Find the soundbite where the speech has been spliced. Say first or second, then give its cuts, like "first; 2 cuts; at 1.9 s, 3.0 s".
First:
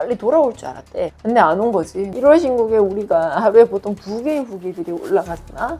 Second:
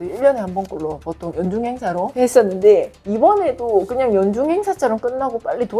first; 1 cut; at 2.1 s